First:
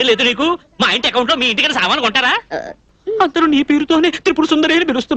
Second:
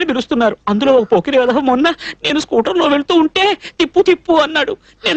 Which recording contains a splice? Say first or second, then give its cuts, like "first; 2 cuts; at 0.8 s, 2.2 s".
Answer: first; 1 cut; at 2.9 s